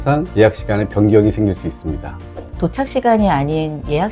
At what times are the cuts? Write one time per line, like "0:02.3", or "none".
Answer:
0:02.5